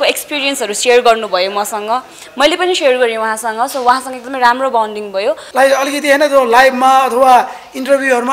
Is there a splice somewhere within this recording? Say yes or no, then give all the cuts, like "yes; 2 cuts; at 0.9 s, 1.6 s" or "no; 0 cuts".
yes; 1 cut; at 5.4 s